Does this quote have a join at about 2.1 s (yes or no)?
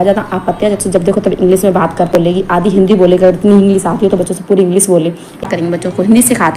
yes